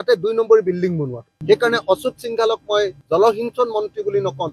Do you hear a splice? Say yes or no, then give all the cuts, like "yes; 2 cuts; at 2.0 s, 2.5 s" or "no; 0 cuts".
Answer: yes; 1 cut; at 1.3 s